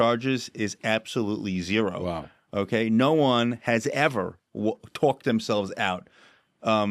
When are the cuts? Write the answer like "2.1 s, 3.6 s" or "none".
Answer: none